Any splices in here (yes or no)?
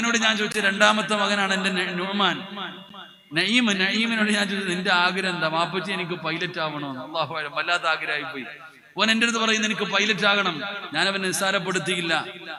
no